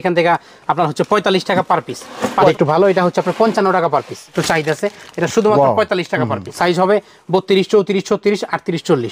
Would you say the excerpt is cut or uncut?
cut